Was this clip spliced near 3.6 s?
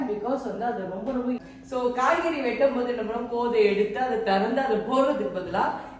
no; 1 cut; at 1.4 s

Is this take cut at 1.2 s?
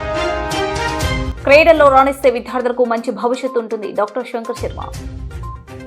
yes; 1 cut; at 1.2 s

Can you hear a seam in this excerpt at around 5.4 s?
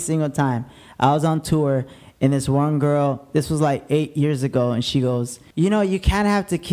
yes; 1 cut; at 5.4 s

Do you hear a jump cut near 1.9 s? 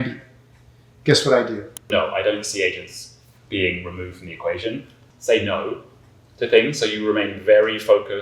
yes; 2 cuts; at 1.9 s, 4.9 s

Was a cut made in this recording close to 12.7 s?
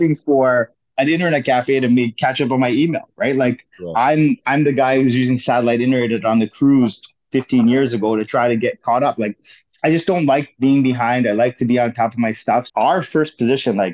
yes; 1 cut; at 12.7 s

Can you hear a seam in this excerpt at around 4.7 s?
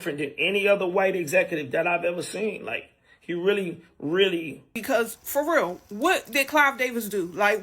yes; 1 cut; at 4.7 s

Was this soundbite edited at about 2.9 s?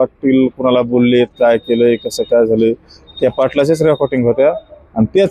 no; 0 cuts

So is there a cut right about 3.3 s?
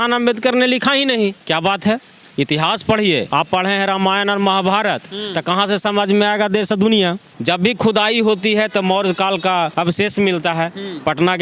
yes; 4 cuts; at 1.4 s, 3.3 s, 7.3 s, 9.7 s

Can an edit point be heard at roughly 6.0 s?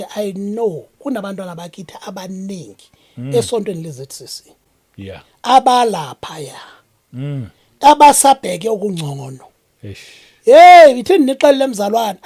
no; 0 cuts

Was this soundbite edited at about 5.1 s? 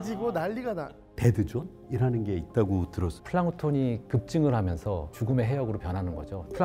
yes; 3 cuts; at 1.2 s, 3.2 s, 5.1 s

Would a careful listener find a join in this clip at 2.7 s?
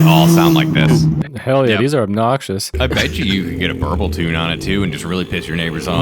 yes; 1 cut; at 2.7 s

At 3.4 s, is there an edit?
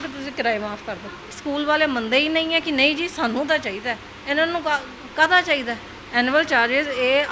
no; 2 cuts; at 1.4 s, 5.9 s

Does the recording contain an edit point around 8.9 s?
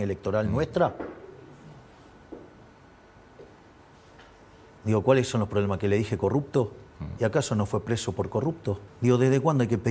yes; 2 cuts; at 4.8 s, 8.9 s

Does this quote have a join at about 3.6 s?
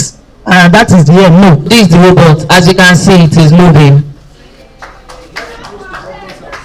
no; 1 cut; at 1.7 s

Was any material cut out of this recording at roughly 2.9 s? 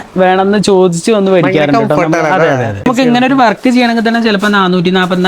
yes; 1 cut; at 2.9 s

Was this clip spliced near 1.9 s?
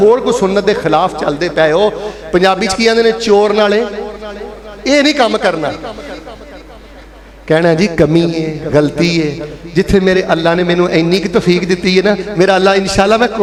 no; 0 cuts

